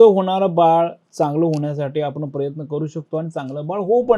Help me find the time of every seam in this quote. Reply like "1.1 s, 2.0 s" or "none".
none